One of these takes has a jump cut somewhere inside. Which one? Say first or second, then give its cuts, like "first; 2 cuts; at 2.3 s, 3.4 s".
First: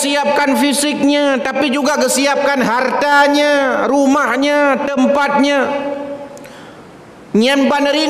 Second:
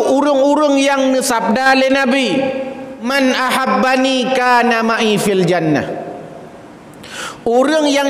second; 1 cut; at 3.1 s